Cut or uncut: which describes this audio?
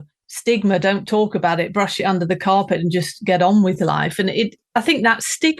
cut